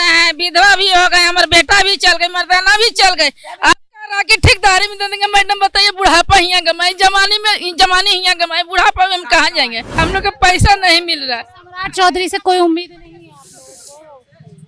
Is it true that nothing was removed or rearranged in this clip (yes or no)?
no